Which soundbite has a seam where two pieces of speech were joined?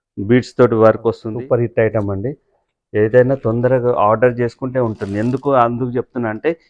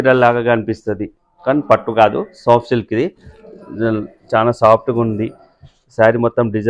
first; 1 cut; at 1.2 s

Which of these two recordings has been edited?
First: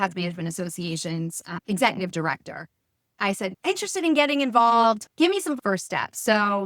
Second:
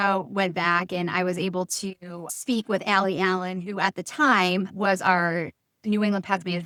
first; 3 cuts; at 1.6 s, 3.2 s, 5.6 s

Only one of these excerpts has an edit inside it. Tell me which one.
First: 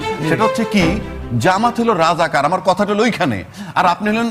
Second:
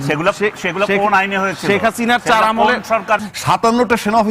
second; 1 cut; at 3.3 s

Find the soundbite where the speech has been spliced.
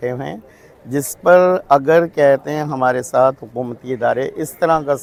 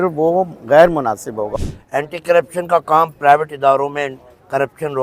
second; 1 cut; at 1.5 s

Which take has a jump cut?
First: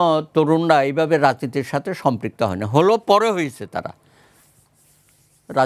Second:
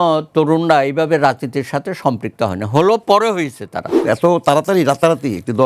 second; 1 cut; at 3.9 s

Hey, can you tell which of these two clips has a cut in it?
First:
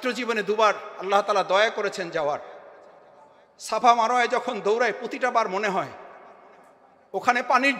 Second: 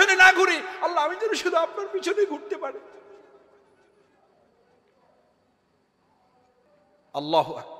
second; 1 cut; at 6.7 s

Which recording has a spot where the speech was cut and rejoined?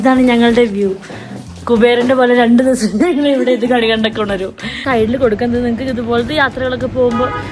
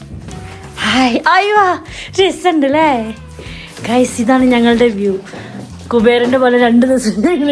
first; 1 cut; at 4.8 s

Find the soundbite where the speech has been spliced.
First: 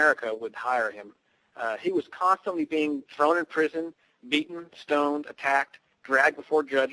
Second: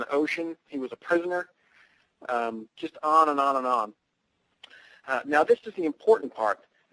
first; 1 cut; at 5.7 s

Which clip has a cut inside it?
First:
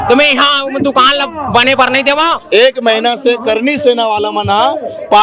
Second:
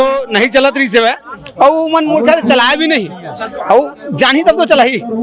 first; 1 cut; at 2.4 s

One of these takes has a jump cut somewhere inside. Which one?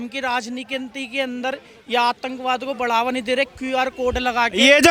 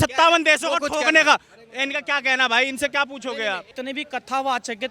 second; 1 cut; at 3.7 s

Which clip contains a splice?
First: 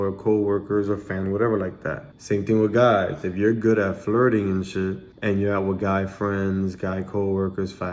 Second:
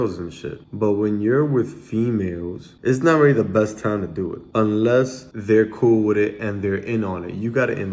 second; 3 cuts; at 2.7 s, 4.3 s, 5.3 s

